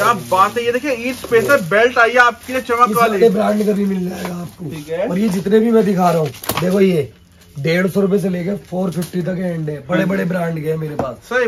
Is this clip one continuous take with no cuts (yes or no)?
yes